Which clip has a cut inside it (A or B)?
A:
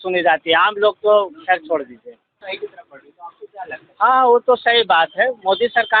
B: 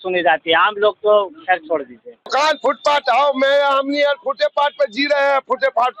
B